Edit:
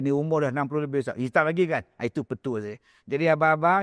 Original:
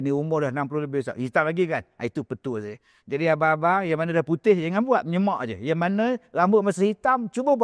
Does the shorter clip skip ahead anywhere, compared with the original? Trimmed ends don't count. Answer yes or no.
no